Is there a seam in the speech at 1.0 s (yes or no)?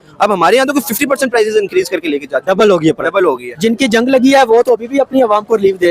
no